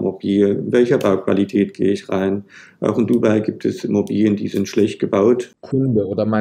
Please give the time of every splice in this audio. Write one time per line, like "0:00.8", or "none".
0:05.5